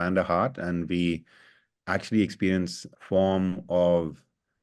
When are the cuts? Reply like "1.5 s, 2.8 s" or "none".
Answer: 2.8 s

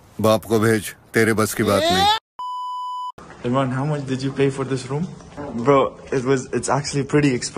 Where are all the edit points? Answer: 3.1 s, 5.3 s

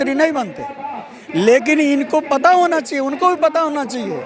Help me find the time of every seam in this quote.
none

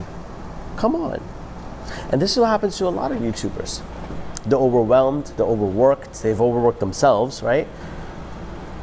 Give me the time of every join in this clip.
none

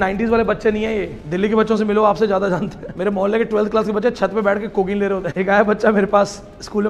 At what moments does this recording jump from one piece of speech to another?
1.2 s, 2.8 s, 5.3 s

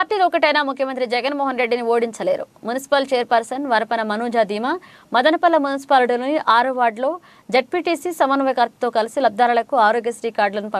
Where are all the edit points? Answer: none

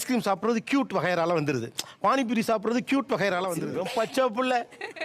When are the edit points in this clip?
3.7 s

